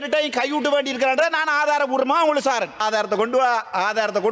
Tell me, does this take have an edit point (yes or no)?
yes